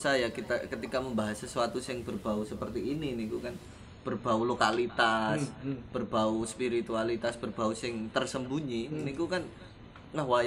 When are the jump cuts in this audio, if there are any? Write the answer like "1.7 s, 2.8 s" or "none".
none